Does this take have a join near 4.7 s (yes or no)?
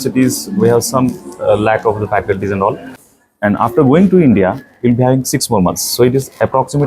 no